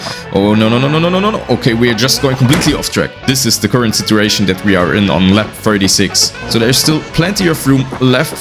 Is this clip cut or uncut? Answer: cut